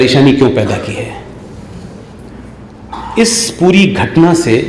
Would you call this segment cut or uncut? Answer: uncut